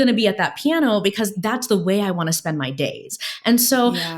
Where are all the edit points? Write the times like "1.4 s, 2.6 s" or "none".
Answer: 1.3 s